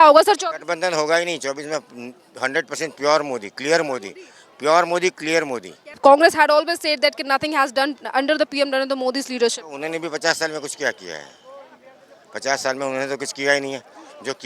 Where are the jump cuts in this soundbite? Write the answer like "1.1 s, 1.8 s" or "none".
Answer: 6.0 s